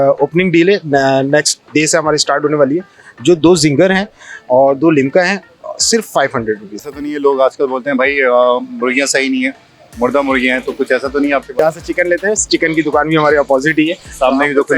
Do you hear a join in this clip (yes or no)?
yes